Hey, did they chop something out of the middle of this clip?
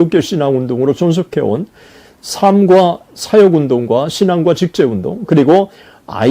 no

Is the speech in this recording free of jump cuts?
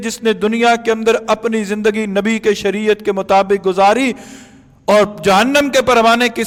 yes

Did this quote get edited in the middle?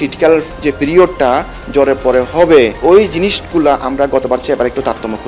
yes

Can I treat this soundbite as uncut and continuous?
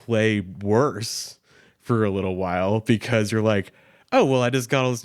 yes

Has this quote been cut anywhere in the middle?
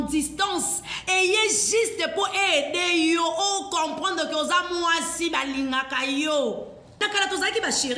yes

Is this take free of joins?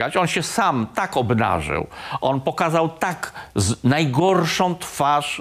yes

